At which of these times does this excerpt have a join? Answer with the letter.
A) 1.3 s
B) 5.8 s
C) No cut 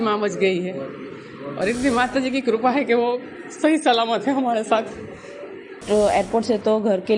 B